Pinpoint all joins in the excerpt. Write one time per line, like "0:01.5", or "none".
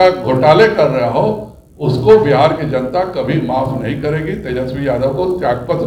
none